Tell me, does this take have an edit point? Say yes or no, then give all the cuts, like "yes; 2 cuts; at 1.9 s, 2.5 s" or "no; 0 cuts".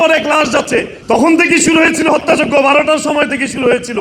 yes; 1 cut; at 0.9 s